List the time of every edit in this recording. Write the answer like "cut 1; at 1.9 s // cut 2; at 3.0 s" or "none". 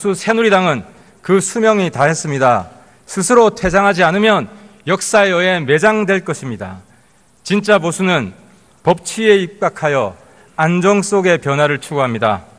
none